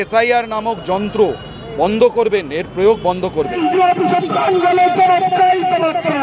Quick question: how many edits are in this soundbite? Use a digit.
1